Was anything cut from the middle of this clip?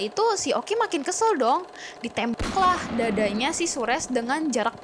no; 0 cuts

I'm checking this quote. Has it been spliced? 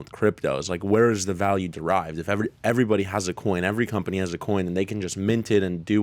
no; 0 cuts

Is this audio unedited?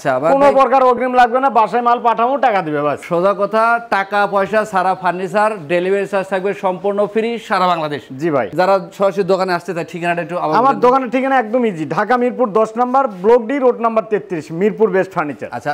yes; 0 cuts

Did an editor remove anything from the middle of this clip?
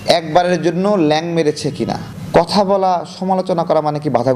yes; 1 cut; at 2.1 s

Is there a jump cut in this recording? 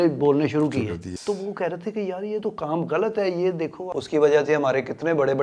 yes; 2 cuts; at 1.1 s, 3.8 s

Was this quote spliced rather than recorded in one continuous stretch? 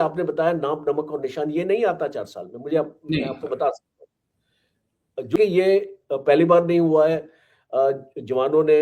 yes; 1 cut; at 5.4 s

